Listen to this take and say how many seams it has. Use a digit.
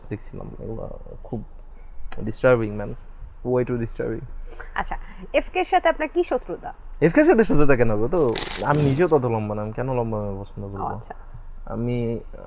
1